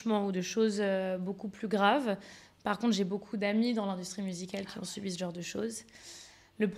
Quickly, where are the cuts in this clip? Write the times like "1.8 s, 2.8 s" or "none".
none